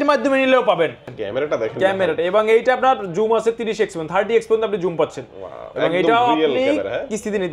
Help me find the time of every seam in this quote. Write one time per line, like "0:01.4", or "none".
0:01.1